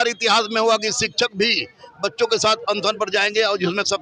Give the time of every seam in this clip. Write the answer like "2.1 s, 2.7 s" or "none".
none